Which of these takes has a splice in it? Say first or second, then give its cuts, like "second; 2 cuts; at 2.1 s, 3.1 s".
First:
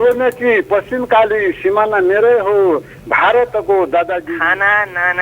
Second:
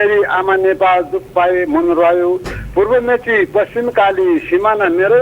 first; 1 cut; at 4.2 s